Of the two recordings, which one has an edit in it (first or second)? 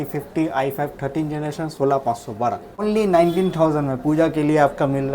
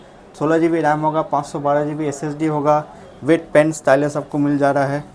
first